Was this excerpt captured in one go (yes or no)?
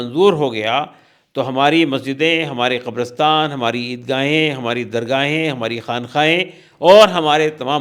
yes